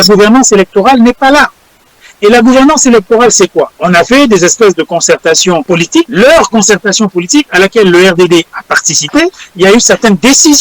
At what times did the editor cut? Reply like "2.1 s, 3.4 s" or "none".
3.8 s, 5.8 s, 7.5 s, 9.4 s

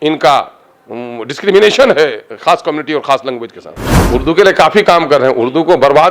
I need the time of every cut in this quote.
4.0 s

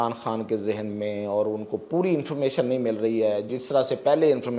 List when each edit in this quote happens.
none

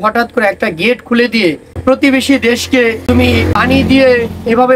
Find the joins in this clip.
1.7 s, 3.2 s

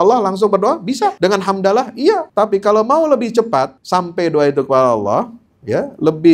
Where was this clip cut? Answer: 1.2 s, 2.3 s, 3.8 s

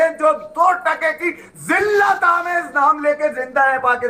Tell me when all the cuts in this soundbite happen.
none

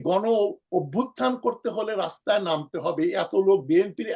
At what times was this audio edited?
none

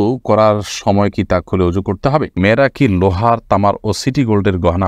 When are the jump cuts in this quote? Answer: 2.4 s

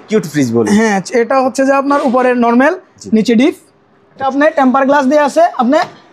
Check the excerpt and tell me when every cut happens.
4.2 s

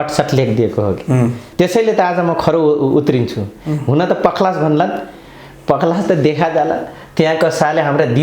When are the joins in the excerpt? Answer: 1.4 s

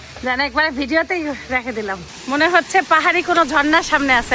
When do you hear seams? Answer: 2.1 s

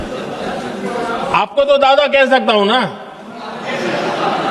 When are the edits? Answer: none

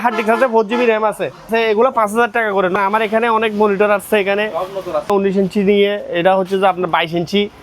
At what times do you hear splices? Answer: 1.5 s, 2.8 s, 5.1 s

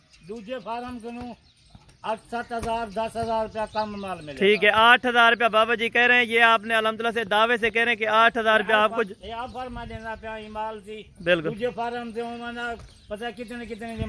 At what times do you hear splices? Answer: none

